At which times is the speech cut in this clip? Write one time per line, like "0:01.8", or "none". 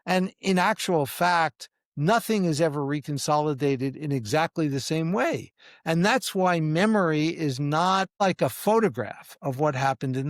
0:08.2